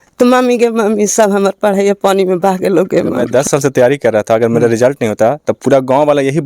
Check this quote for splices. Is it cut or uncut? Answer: cut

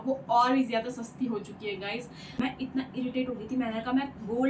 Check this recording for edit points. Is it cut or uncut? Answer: cut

